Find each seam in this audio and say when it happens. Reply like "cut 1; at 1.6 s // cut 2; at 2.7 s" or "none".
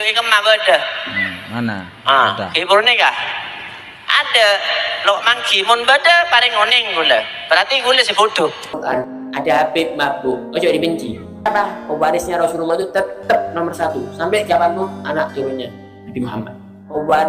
cut 1; at 8.7 s // cut 2; at 11.5 s